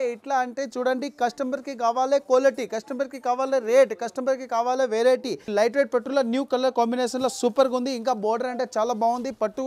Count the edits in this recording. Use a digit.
1